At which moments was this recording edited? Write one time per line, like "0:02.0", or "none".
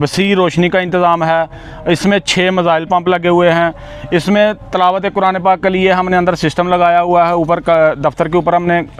none